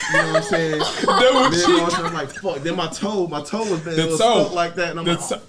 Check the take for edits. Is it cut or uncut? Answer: uncut